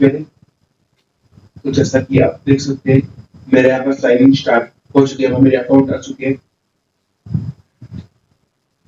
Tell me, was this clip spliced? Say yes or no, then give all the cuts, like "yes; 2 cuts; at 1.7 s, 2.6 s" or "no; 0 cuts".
no; 0 cuts